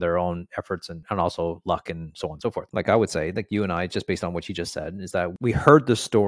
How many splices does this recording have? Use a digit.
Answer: 3